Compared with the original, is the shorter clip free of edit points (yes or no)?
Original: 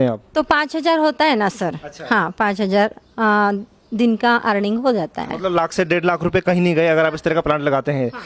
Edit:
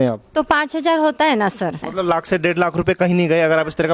no